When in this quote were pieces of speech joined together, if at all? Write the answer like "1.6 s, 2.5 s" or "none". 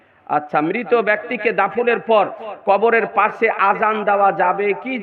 none